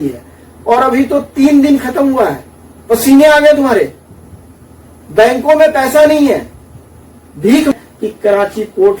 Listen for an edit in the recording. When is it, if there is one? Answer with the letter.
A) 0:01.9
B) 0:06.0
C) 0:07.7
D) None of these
C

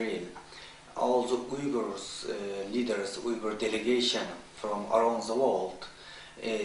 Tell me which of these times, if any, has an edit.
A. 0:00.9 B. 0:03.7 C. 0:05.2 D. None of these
D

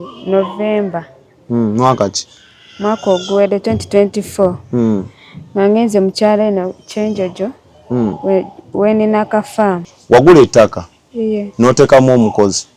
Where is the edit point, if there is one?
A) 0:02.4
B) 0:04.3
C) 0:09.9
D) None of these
C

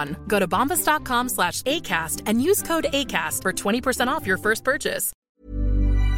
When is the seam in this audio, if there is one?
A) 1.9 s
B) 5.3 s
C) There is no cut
B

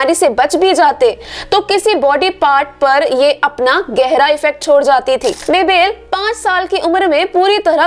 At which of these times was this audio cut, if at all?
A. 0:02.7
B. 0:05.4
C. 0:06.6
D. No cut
B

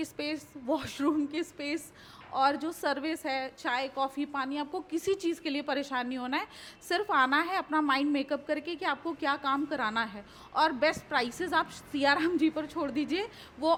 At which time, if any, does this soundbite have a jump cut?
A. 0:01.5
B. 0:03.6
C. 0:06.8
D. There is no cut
D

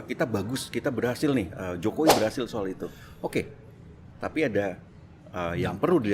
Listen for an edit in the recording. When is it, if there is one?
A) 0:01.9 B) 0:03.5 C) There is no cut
C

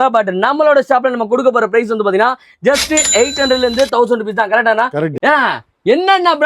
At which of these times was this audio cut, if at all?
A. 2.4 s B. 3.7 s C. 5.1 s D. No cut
C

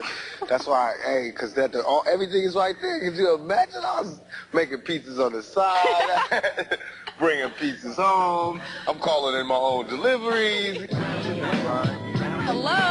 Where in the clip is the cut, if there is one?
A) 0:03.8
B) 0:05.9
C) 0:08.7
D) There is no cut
C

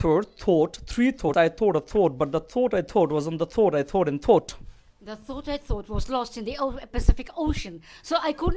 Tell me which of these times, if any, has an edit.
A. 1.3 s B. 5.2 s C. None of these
A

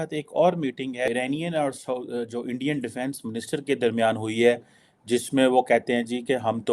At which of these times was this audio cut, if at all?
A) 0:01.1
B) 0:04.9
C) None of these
A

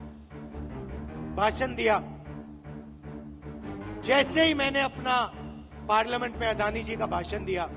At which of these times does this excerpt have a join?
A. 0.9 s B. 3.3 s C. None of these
A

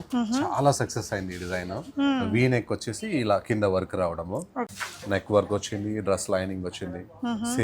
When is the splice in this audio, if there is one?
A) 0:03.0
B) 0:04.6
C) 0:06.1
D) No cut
B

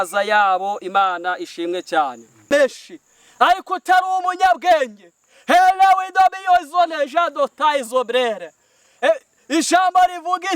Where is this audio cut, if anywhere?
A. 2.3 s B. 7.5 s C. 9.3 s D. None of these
A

